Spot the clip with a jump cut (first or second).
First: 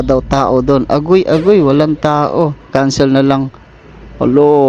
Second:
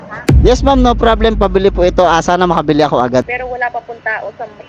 second